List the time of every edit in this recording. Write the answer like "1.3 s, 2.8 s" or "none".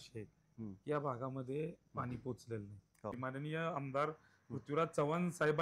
3.2 s